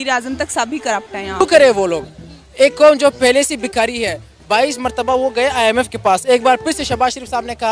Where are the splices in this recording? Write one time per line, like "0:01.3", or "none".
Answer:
none